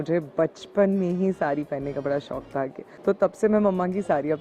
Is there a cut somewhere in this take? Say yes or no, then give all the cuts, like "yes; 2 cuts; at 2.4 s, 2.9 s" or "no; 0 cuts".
yes; 1 cut; at 2.8 s